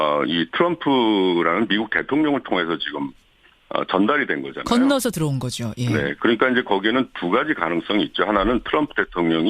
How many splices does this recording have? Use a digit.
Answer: 1